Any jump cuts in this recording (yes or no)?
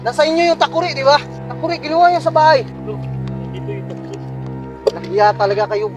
yes